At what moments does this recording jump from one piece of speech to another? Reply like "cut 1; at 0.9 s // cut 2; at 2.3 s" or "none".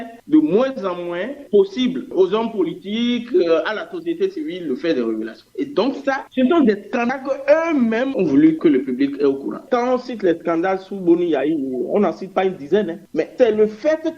cut 1; at 9.6 s